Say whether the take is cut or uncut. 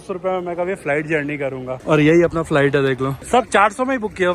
cut